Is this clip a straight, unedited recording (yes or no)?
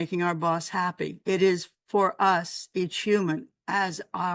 no